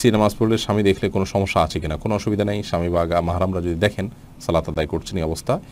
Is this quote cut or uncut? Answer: uncut